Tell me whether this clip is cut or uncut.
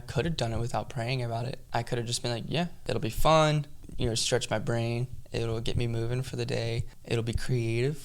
cut